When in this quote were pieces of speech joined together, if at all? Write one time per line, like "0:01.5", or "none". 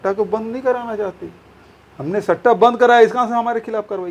none